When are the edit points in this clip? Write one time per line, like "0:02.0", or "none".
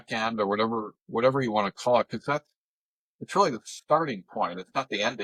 none